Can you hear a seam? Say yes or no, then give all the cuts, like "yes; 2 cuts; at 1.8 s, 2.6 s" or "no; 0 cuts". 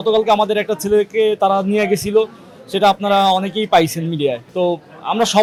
no; 0 cuts